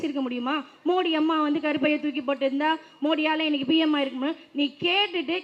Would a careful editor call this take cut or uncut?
uncut